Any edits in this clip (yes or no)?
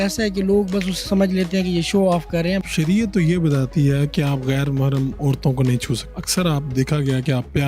yes